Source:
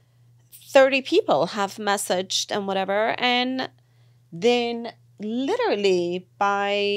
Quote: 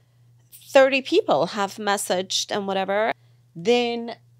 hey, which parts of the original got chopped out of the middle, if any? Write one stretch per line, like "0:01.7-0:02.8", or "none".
0:03.2-0:03.9